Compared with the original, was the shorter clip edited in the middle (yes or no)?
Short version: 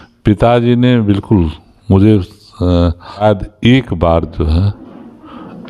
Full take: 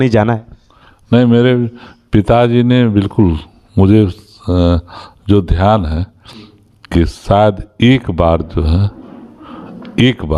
yes